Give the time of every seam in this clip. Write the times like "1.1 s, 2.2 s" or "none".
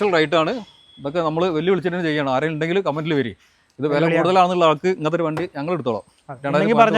none